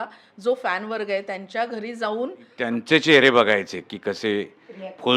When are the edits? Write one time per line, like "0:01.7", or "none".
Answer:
0:02.5